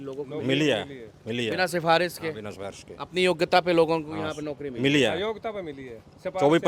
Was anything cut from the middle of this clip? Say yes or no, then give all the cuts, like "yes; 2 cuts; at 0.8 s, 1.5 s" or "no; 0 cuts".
no; 0 cuts